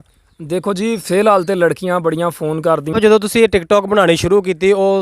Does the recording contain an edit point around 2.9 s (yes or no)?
yes